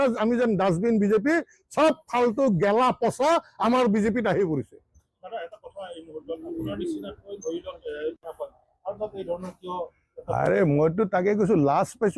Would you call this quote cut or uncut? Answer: uncut